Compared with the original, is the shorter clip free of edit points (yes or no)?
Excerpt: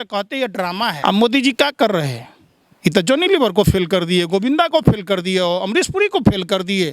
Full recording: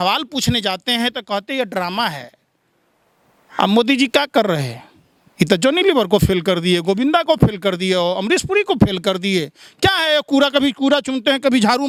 no